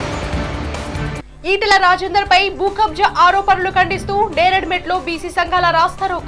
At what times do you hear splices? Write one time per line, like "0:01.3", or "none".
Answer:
0:01.1